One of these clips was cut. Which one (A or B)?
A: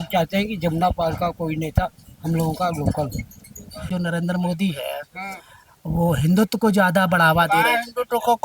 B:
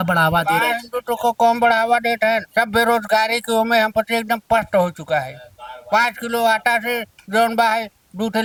A